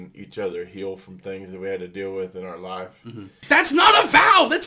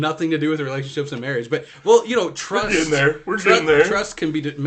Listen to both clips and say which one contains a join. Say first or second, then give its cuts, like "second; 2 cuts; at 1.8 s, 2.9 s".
first; 1 cut; at 3.4 s